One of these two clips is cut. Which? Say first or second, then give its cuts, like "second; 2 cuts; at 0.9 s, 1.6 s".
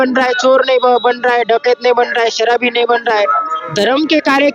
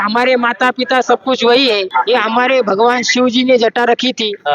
second; 1 cut; at 1.9 s